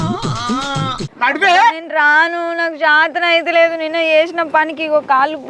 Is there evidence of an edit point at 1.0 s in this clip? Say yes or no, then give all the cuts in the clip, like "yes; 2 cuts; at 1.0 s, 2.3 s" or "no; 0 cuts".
yes; 1 cut; at 1.0 s